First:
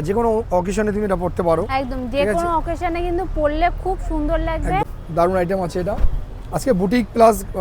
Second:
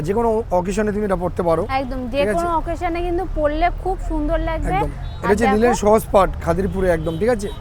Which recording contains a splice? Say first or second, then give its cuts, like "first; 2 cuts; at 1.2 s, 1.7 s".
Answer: first; 1 cut; at 5.0 s